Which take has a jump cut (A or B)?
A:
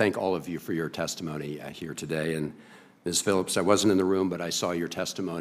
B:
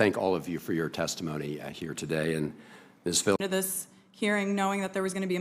A